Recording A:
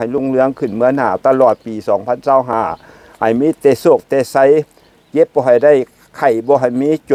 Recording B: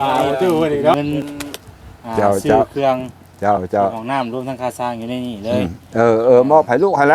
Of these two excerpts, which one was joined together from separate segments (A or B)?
B